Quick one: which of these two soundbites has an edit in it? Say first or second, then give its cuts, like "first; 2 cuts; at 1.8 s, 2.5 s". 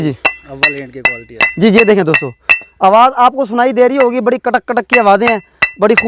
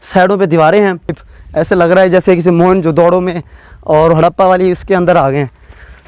second; 1 cut; at 1.2 s